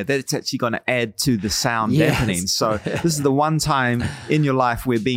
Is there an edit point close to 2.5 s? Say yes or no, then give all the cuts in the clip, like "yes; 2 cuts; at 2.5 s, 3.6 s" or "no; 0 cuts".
no; 0 cuts